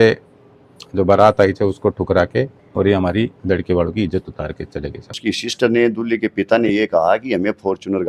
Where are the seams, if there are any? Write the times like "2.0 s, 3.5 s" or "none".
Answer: 5.2 s